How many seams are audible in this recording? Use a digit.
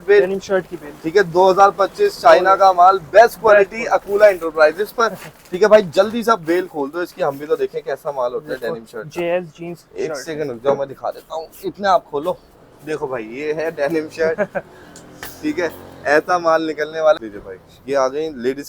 1